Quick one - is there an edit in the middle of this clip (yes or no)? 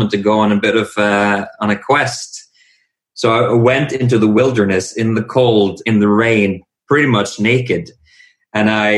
no